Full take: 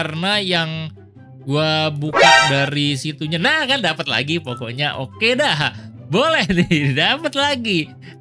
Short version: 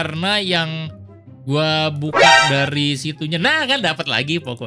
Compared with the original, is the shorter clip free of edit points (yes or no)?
yes